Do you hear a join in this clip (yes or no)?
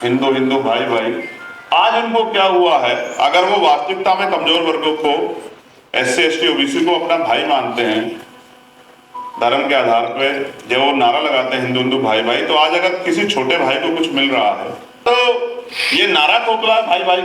yes